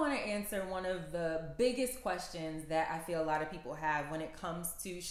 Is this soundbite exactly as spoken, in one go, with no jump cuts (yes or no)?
yes